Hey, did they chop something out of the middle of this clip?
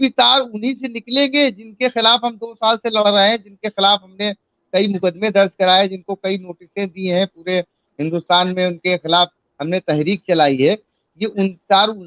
no; 0 cuts

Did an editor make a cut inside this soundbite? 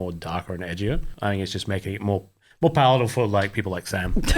yes; 1 cut; at 1.2 s

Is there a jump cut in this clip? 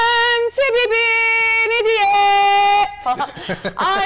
no; 0 cuts

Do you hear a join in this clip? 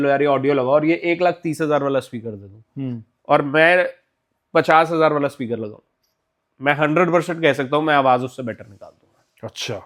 no; 0 cuts

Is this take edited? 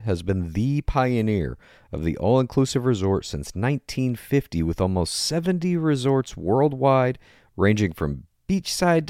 no; 0 cuts

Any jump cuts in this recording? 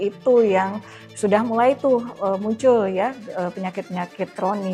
no; 0 cuts

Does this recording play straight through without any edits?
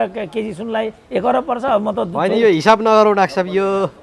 yes; 0 cuts

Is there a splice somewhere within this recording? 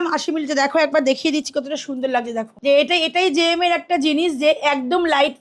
yes; 1 cut; at 2.4 s

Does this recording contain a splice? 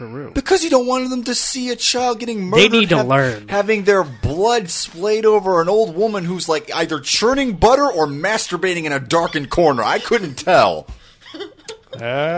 no; 0 cuts

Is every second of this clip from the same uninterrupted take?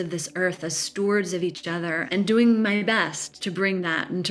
no; 2 cuts; at 2.0 s, 3.4 s

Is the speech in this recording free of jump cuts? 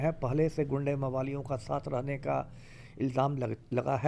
yes; 0 cuts

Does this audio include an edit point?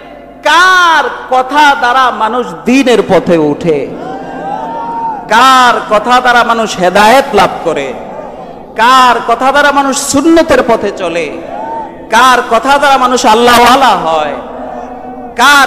no; 0 cuts

